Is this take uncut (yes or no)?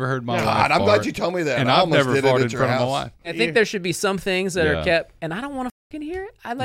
no